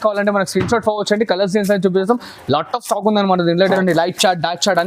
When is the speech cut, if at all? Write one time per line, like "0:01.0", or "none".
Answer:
0:03.6